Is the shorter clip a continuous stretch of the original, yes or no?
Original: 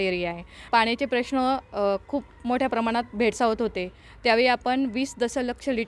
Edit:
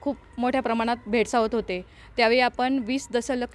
yes